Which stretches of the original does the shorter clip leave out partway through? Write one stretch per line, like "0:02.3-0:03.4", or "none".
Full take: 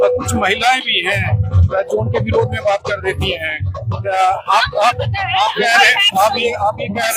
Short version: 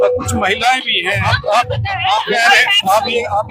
0:01.4-0:04.6